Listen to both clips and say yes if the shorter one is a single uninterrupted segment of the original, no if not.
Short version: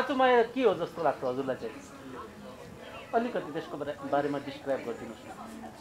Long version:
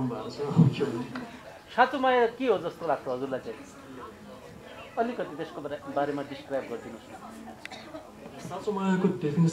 yes